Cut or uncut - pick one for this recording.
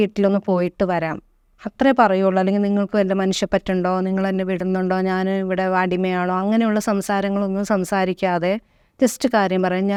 uncut